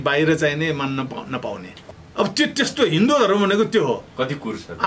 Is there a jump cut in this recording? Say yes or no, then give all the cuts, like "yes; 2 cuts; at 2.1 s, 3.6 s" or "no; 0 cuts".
yes; 1 cut; at 1.7 s